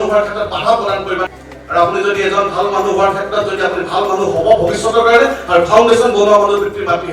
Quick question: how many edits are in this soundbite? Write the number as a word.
one